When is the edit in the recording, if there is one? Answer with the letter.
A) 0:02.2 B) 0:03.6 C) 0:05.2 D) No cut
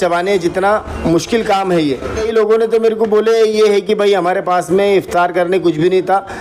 A